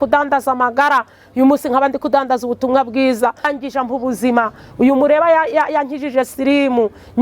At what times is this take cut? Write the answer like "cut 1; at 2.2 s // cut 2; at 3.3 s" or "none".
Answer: cut 1; at 3.5 s